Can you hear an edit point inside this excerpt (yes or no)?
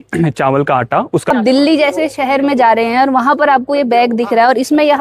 yes